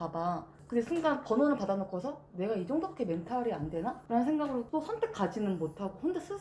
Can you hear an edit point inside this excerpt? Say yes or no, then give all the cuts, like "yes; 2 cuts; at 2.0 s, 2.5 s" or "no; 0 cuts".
yes; 2 cuts; at 4.0 s, 4.7 s